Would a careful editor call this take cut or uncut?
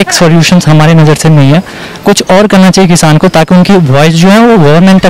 uncut